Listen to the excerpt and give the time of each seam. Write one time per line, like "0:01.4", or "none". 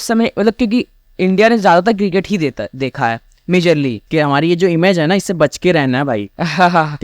0:04.0